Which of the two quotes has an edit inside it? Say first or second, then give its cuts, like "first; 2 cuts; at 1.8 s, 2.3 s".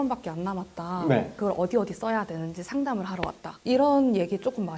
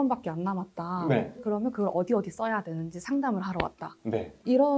first; 2 cuts; at 1.4 s, 3.5 s